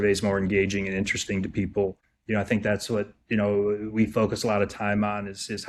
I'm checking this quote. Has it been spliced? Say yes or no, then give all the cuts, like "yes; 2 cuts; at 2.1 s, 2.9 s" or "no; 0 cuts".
yes; 1 cut; at 2.1 s